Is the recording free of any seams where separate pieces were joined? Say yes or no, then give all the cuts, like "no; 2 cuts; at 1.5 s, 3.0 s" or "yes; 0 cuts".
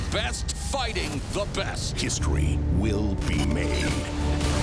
yes; 0 cuts